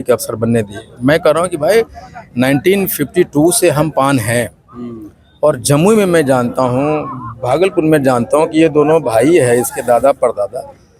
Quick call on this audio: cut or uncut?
uncut